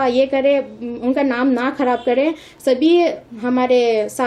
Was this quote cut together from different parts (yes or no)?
no